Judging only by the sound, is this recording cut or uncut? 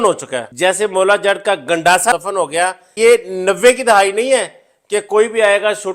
cut